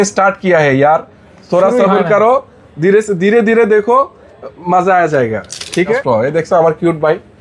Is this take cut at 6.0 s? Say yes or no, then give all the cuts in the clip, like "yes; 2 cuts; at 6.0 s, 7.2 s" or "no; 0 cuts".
yes; 1 cut; at 6.0 s